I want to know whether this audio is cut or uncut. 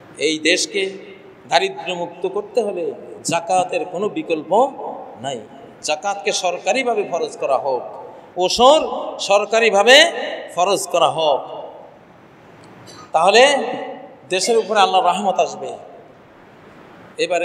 uncut